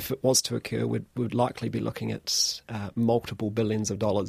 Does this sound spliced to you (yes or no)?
no